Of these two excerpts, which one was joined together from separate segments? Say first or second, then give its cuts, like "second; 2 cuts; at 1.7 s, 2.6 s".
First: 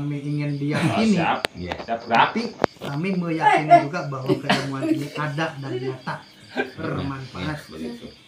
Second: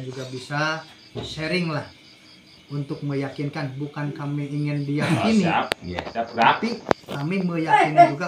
first; 1 cut; at 6.8 s